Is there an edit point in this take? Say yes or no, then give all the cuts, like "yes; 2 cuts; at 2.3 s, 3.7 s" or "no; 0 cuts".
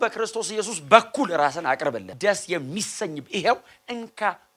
yes; 1 cut; at 2.1 s